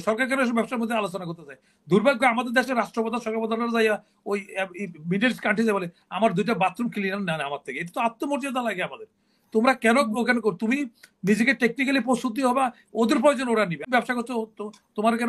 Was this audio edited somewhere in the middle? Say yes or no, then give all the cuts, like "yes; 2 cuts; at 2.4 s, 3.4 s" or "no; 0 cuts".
yes; 1 cut; at 13.8 s